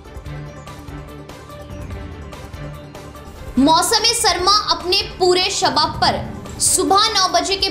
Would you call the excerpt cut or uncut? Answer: uncut